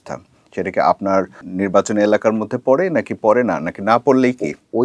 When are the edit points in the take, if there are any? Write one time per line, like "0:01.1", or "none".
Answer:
0:01.5